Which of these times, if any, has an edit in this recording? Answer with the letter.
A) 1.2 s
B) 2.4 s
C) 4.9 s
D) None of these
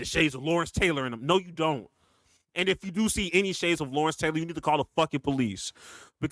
D